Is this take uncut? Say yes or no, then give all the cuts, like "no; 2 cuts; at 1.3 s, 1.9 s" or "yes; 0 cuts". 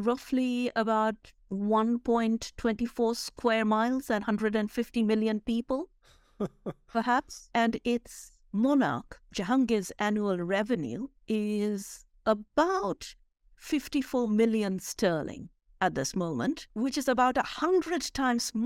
yes; 0 cuts